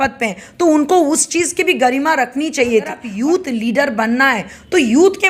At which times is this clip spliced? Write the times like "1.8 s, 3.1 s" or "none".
3.0 s